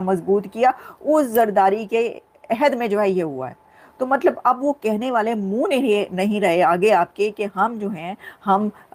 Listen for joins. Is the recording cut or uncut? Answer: uncut